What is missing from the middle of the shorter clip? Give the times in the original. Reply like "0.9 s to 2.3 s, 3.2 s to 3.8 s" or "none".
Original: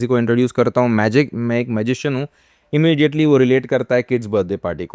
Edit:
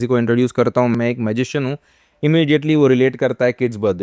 0.9 s to 1.4 s